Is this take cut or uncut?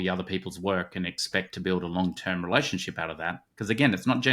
uncut